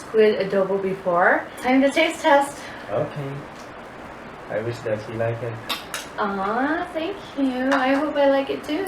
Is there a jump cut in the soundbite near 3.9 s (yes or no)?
yes